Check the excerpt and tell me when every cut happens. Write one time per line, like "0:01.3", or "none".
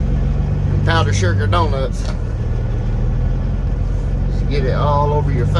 none

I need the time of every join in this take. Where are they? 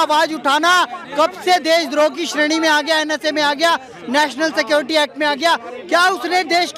none

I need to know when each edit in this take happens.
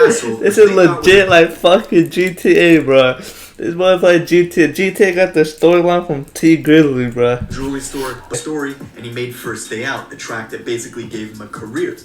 0:08.3

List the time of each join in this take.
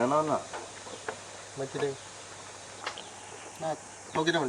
0:02.8

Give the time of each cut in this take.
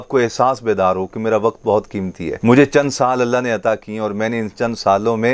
0:02.3

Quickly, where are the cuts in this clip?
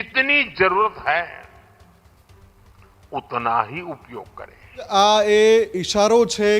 0:04.9

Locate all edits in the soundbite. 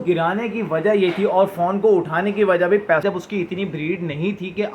0:03.0

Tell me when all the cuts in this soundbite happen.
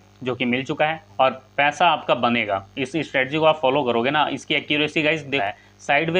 0:01.0
0:05.4

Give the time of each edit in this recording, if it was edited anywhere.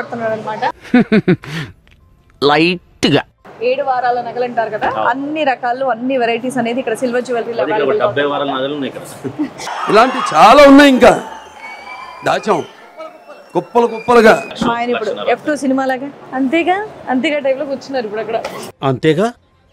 0:03.4
0:14.5

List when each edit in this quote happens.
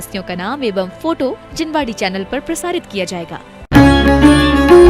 0:03.6

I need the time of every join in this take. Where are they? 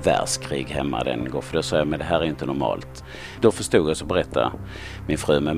0:03.0

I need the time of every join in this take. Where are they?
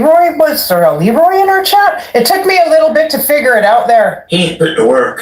0:04.2

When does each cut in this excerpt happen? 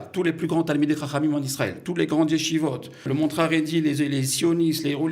0:03.0

